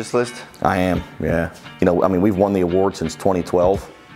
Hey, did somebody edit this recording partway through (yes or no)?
no